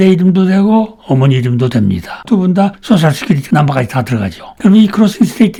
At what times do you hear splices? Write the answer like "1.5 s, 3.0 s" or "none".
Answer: none

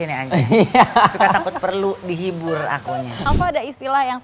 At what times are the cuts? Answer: 3.2 s

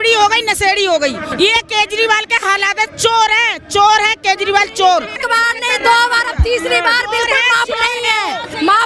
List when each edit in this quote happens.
1.3 s, 5.2 s

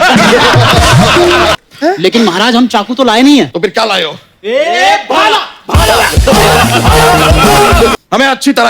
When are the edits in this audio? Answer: 1.6 s, 7.9 s

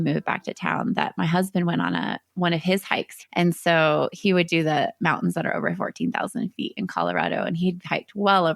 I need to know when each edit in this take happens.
3.1 s

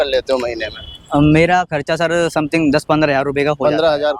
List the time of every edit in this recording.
none

